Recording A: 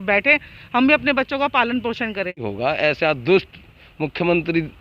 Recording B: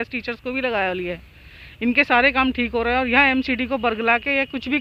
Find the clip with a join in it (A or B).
A